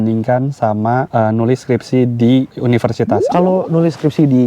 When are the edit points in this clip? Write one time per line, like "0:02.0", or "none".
0:03.2